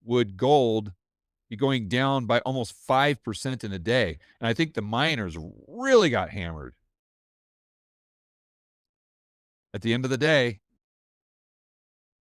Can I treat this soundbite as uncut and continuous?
yes; 0 cuts

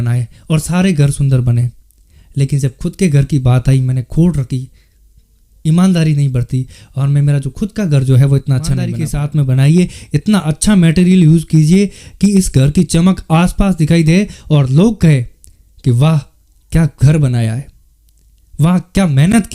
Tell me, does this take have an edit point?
yes; 1 cut; at 9.0 s

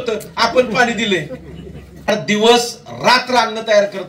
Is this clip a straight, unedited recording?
no; 1 cut; at 2.1 s

